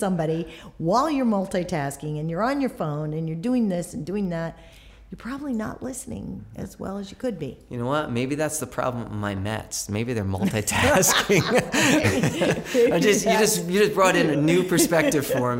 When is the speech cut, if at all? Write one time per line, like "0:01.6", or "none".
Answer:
0:14.4